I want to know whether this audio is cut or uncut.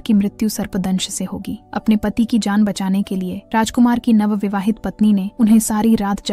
uncut